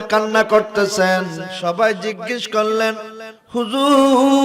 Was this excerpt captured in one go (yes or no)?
no